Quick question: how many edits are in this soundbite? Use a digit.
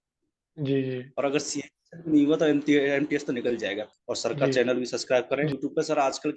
2